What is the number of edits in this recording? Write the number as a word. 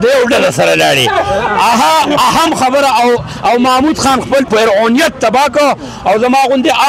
one